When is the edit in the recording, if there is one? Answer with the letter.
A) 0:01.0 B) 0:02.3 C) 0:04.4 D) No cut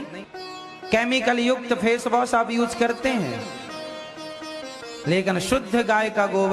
A